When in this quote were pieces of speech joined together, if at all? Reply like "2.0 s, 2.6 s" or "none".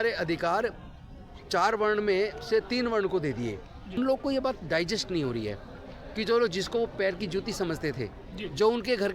4.0 s